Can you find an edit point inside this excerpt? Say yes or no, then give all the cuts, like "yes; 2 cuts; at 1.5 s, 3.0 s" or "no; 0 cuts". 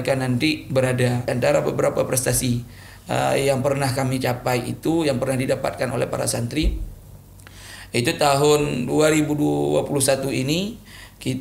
yes; 1 cut; at 1.3 s